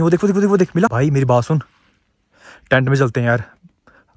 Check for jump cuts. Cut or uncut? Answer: cut